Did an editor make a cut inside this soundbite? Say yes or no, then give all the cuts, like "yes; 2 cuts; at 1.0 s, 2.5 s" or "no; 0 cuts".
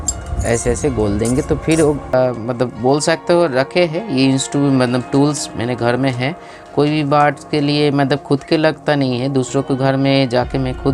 yes; 1 cut; at 2.1 s